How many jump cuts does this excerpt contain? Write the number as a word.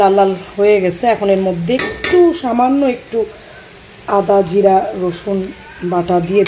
zero